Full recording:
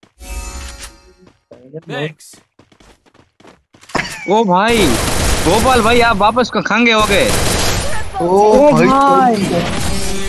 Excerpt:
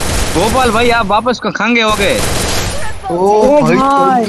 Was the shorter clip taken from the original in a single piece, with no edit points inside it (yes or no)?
yes